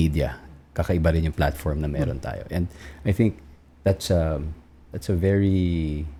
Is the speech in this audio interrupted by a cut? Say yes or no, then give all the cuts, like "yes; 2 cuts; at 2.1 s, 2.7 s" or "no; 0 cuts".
no; 0 cuts